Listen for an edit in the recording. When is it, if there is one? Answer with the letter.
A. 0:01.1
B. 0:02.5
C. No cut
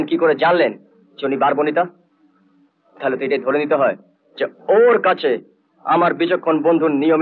C